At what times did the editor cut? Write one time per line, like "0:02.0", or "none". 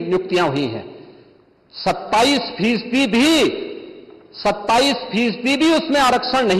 none